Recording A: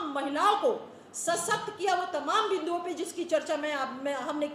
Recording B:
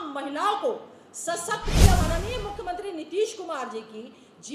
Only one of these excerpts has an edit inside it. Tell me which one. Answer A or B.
B